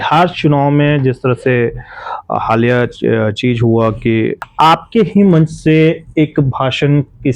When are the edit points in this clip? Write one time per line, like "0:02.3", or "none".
0:04.4